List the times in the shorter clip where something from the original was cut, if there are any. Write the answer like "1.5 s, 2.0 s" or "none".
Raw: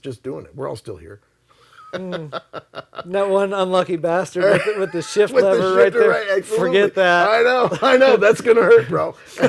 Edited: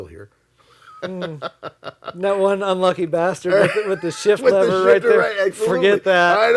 none